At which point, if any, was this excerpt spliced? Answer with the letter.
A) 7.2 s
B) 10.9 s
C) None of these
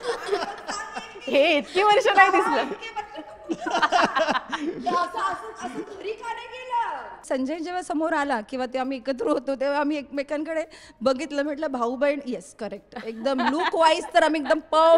A